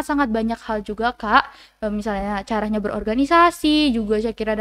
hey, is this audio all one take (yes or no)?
yes